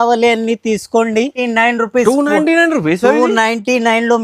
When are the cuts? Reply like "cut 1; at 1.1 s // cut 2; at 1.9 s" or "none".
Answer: cut 1; at 1.4 s